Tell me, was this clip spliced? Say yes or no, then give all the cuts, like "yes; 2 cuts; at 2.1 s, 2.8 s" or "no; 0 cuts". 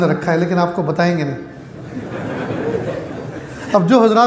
no; 0 cuts